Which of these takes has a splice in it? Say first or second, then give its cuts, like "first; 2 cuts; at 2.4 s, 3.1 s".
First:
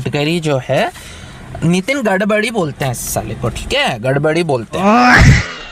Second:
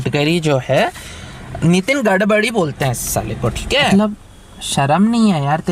second; 1 cut; at 3.9 s